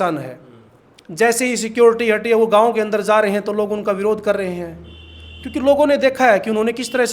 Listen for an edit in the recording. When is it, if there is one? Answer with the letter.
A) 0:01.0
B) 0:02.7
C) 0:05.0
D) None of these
D